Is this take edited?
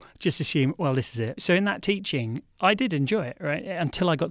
yes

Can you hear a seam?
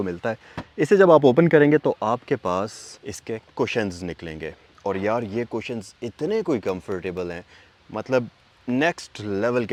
no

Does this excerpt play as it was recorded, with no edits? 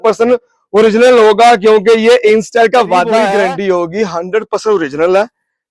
no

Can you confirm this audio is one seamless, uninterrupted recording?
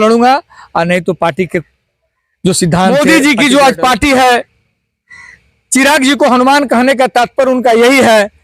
no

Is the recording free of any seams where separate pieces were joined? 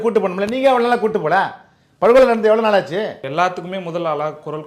no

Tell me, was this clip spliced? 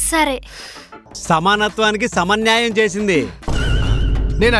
yes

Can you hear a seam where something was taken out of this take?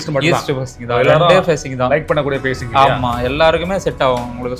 no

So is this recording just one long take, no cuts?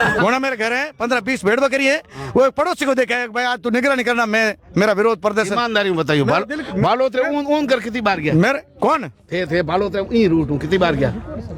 yes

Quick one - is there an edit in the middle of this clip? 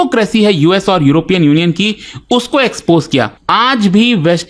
yes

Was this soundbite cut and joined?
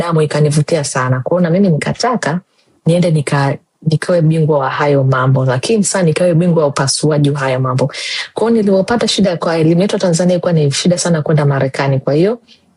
no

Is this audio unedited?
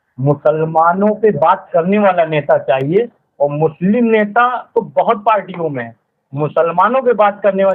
yes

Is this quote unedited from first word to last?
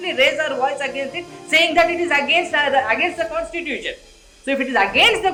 yes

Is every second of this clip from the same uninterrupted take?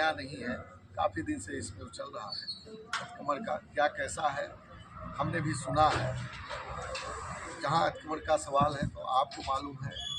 yes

